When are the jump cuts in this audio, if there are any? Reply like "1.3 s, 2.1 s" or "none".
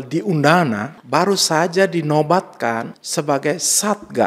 0.9 s, 3.0 s